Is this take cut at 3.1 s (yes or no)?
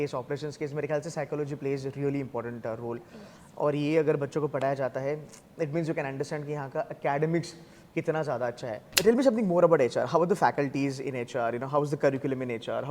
no